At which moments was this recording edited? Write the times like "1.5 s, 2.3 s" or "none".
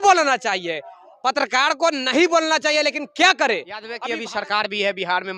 4.0 s